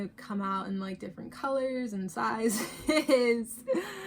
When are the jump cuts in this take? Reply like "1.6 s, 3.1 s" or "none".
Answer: none

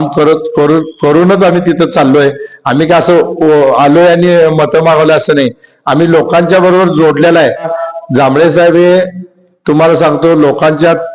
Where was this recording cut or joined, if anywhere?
7.8 s

